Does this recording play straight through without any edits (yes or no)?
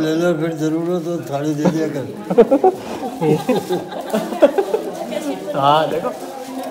yes